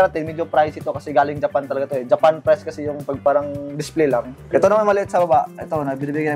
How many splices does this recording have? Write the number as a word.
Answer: one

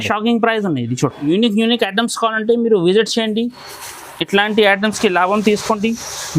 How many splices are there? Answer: one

